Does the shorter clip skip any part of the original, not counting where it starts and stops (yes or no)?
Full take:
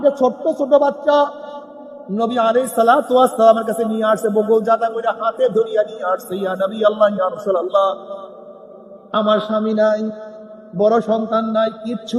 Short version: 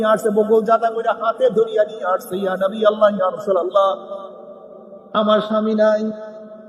no